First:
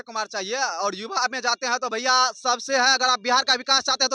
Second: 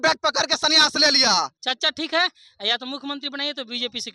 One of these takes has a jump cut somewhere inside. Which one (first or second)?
second